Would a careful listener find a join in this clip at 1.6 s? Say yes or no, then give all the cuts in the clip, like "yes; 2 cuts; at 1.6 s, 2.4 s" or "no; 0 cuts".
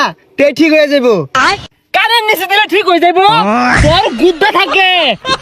yes; 1 cut; at 1.6 s